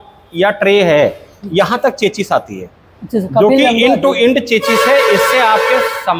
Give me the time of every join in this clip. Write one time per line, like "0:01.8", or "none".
none